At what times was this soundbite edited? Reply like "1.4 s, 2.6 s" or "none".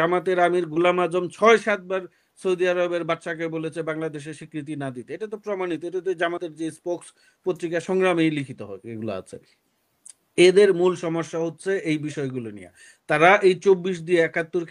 none